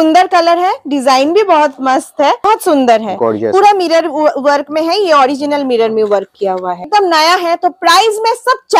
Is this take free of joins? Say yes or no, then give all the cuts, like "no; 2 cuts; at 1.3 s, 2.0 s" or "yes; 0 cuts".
no; 2 cuts; at 2.5 s, 6.9 s